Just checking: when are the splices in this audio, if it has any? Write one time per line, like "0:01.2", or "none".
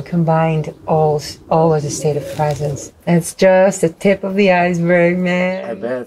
0:02.9